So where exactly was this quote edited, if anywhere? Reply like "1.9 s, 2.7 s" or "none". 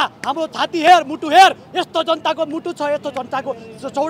none

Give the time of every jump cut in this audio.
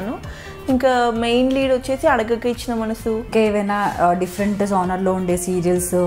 3.3 s

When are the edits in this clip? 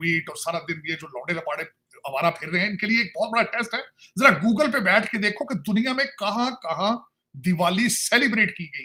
none

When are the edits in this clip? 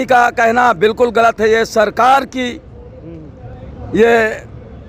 none

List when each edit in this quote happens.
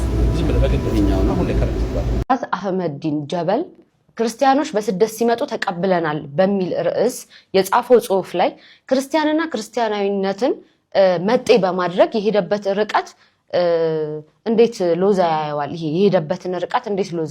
2.2 s

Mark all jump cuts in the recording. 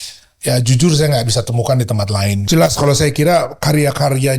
2.4 s

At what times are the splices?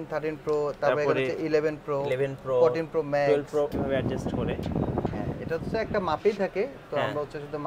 3.7 s

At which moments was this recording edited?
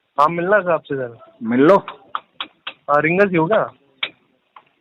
none

